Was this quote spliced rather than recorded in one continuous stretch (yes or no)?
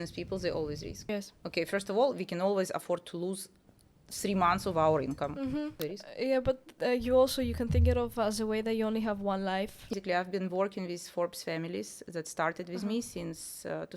yes